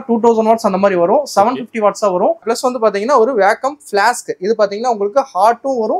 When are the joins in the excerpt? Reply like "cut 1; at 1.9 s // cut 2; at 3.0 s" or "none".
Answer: cut 1; at 2.4 s